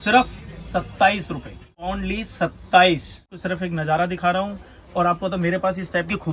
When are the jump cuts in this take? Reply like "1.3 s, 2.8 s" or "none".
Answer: 1.8 s, 3.2 s